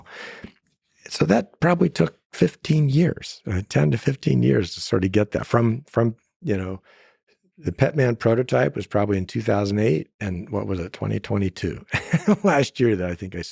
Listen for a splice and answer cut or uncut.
uncut